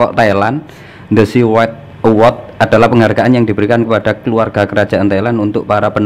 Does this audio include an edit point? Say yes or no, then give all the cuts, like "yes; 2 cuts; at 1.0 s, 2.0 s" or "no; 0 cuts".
no; 0 cuts